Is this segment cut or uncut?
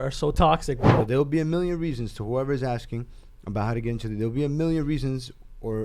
cut